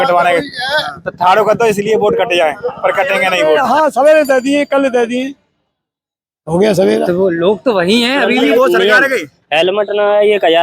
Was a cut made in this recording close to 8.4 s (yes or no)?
yes